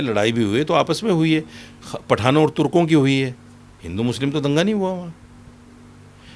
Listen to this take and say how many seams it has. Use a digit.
0